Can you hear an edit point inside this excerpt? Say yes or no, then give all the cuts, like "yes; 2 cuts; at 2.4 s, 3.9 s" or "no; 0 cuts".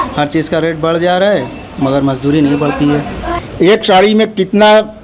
yes; 1 cut; at 3.2 s